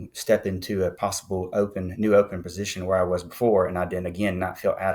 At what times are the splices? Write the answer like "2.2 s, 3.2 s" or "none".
1.0 s